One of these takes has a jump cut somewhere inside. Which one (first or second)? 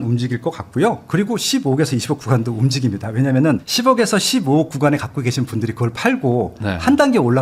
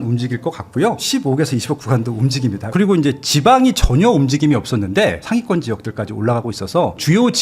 second